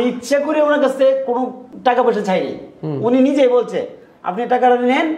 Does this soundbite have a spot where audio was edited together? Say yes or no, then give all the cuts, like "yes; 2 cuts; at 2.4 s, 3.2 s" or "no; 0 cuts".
yes; 1 cut; at 1.6 s